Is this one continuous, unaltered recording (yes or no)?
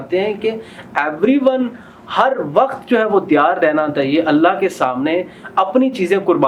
yes